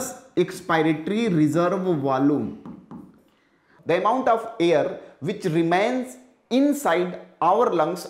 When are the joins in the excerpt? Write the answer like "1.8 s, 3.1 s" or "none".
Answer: 3.7 s